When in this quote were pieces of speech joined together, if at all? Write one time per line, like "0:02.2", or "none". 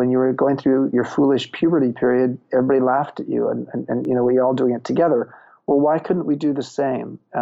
0:00.9